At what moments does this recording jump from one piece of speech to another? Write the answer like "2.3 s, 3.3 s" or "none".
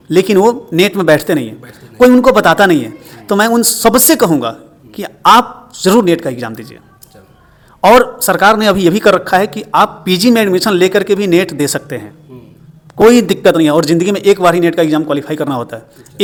none